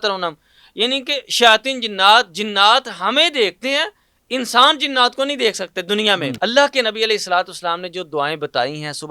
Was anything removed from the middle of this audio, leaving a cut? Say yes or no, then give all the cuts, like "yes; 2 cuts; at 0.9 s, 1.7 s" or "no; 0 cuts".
yes; 1 cut; at 6.3 s